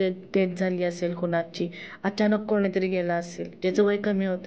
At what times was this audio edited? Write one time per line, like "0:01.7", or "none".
none